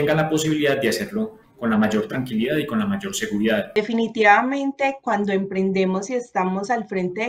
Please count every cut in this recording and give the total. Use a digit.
1